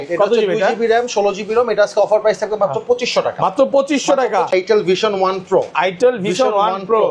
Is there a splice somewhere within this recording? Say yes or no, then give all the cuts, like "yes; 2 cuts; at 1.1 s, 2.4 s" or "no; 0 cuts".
yes; 1 cut; at 4.5 s